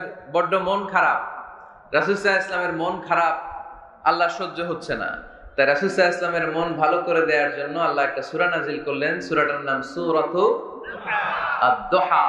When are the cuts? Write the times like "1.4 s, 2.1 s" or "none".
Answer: none